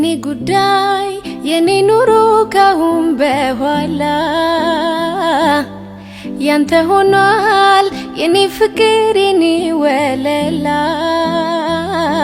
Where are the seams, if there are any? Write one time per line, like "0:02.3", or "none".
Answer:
none